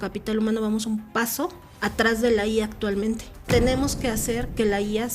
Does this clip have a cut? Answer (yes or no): yes